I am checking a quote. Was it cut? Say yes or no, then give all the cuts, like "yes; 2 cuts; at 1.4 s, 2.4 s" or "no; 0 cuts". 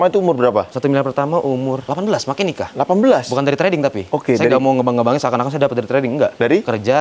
no; 0 cuts